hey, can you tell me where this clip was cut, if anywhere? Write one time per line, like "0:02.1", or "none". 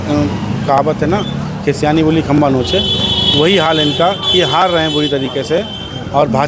none

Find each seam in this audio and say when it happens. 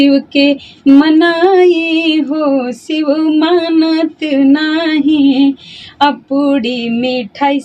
none

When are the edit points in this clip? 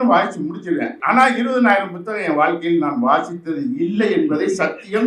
0:01.0

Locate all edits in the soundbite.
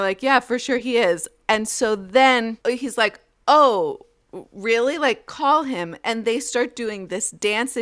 0:02.5

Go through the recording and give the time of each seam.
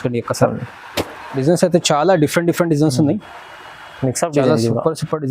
0:01.2

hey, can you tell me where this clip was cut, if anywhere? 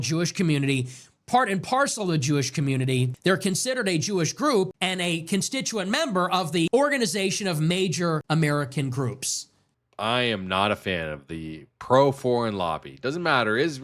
0:03.1
0:04.8
0:06.7
0:08.2
0:09.4

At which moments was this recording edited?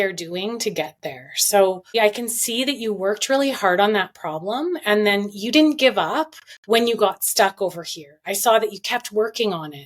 0:01.9

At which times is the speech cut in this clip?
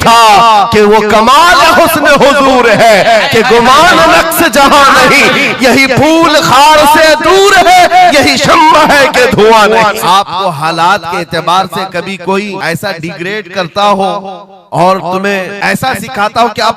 0:10.0
0:12.6
0:15.5

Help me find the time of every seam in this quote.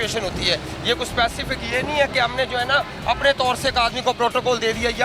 none

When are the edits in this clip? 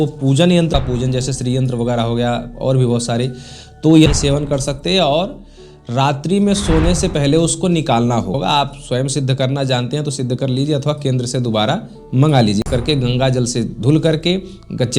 0:00.7
0:04.1
0:08.4
0:12.6

